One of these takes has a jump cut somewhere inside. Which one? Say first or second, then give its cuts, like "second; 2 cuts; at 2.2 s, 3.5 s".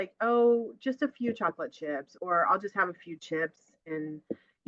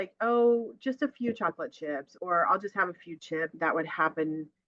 second; 1 cut; at 3.5 s